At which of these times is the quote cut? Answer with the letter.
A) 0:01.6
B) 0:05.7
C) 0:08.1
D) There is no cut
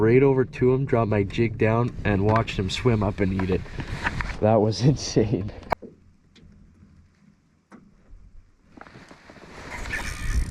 B